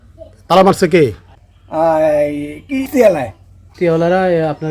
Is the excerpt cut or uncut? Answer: cut